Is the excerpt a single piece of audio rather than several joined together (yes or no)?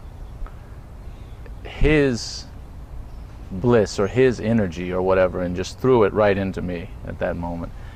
yes